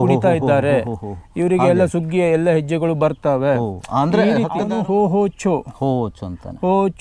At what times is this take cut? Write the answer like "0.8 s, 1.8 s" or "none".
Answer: 4.6 s